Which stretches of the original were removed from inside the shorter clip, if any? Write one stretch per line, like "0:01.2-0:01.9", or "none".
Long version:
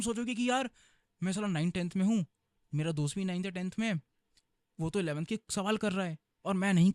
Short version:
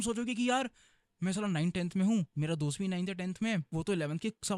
0:02.3-0:02.7
0:04.0-0:04.7